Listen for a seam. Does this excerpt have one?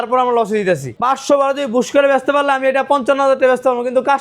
yes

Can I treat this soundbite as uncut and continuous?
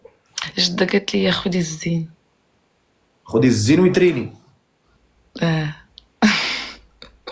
yes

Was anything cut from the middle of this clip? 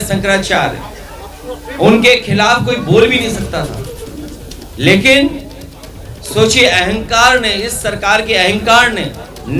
no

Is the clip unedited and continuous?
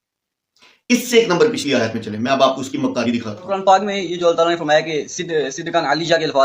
no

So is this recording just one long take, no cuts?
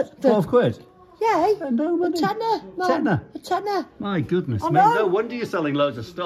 yes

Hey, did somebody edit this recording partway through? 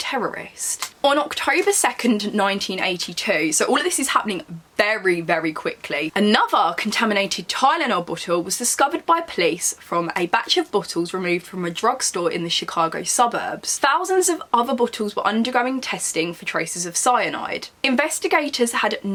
no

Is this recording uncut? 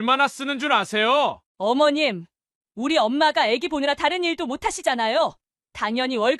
no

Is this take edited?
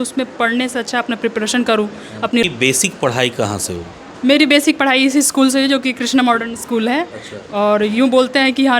yes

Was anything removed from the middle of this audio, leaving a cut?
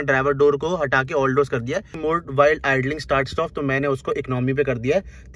yes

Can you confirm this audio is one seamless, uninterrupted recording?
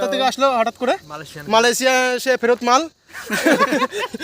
no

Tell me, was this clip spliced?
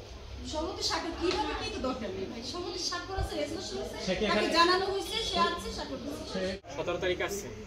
yes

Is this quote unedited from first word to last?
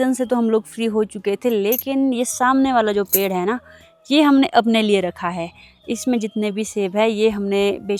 yes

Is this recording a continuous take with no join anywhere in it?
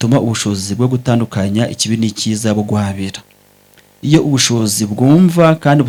yes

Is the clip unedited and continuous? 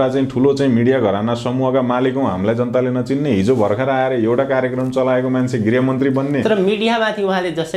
yes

